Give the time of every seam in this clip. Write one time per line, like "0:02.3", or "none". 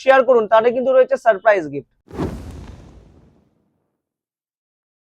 none